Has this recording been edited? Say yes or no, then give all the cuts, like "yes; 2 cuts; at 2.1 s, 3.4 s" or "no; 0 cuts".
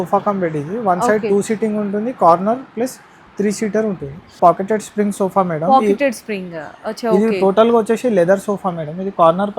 yes; 1 cut; at 4.4 s